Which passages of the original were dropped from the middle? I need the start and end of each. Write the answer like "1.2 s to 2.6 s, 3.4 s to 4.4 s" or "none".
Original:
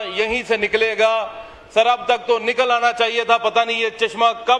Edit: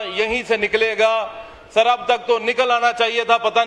none